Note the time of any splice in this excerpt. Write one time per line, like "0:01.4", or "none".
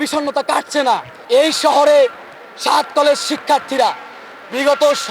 0:01.1

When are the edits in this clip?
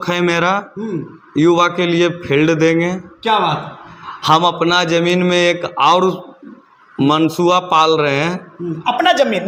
none

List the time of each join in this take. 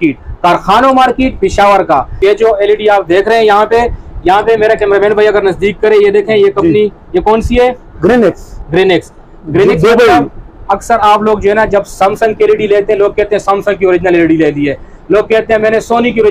0:02.2

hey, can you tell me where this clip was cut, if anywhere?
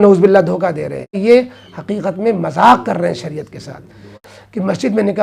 0:01.2
0:04.3

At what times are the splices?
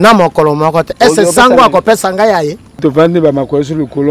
0:02.8

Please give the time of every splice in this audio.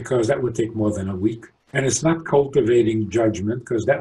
0:01.5

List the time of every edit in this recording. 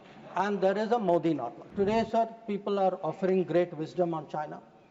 0:01.6

